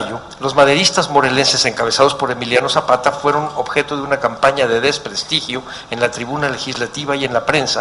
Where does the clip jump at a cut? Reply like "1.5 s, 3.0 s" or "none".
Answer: none